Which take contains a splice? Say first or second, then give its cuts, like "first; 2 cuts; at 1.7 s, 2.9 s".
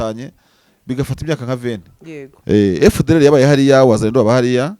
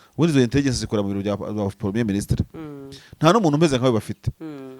first; 1 cut; at 2.3 s